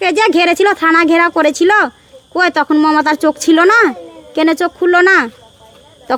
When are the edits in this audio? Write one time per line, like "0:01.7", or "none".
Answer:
none